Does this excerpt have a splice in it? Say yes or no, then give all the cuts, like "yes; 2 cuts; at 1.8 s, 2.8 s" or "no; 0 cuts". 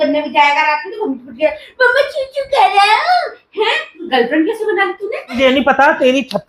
yes; 2 cuts; at 3.9 s, 5.3 s